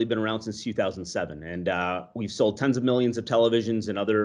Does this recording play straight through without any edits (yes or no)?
yes